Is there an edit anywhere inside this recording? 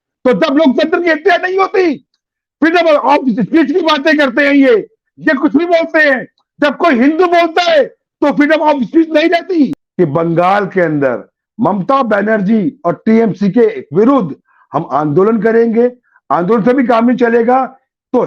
yes; 1 cut; at 9.8 s

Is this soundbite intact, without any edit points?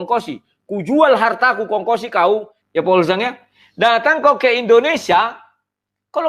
no; 1 cut; at 2.6 s

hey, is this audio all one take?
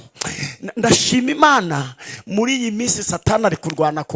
yes; 0 cuts

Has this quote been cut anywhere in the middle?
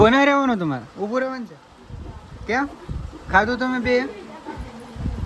no; 0 cuts

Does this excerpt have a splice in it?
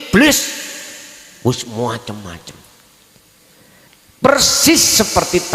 yes; 1 cut; at 3.9 s

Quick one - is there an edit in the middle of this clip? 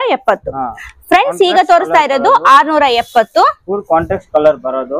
no; 0 cuts

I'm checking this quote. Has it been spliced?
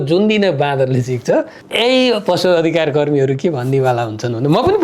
yes; 1 cut; at 1.6 s

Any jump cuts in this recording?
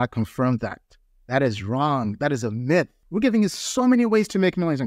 yes; 1 cut; at 3.0 s

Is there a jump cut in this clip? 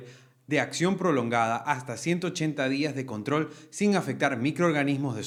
no; 0 cuts

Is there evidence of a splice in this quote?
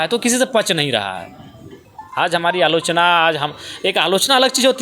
no; 0 cuts

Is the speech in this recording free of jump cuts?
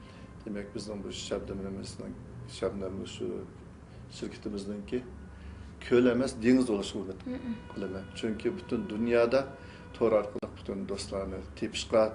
yes; 0 cuts

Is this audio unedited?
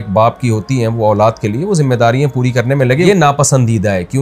yes; 0 cuts

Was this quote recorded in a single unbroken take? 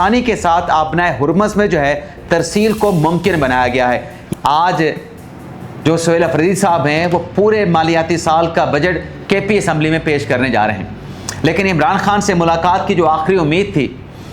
no; 1 cut; at 4.2 s

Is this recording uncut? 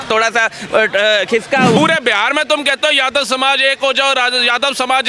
no; 1 cut; at 1.8 s

